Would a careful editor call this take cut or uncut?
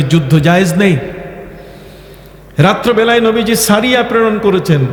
uncut